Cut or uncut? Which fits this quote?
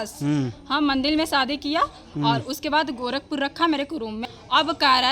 cut